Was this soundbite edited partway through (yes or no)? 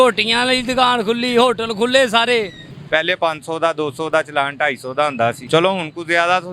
yes